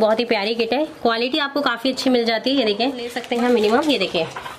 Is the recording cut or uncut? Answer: cut